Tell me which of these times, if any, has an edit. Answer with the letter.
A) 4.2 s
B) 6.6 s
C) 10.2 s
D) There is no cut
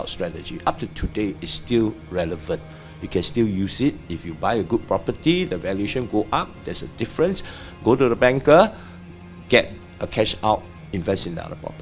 D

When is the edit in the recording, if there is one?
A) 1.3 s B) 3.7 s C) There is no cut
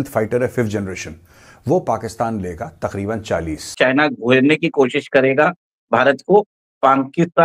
B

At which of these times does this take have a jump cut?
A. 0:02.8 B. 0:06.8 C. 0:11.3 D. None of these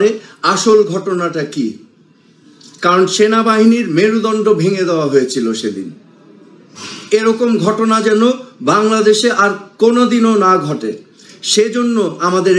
D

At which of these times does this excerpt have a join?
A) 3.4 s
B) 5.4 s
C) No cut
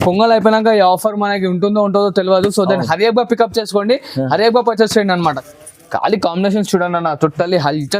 B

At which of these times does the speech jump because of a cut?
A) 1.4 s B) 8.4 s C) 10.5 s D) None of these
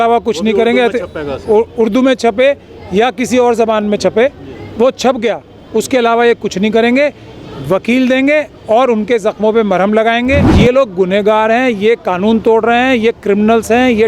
C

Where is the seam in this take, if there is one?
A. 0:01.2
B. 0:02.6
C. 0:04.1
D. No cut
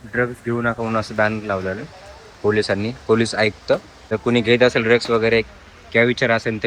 C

